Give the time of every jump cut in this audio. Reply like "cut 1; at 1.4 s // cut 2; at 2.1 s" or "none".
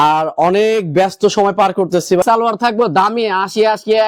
cut 1; at 2.2 s